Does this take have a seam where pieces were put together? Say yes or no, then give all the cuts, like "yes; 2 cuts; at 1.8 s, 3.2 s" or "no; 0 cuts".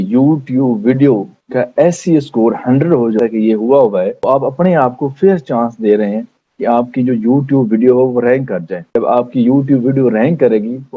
yes; 1 cut; at 3.2 s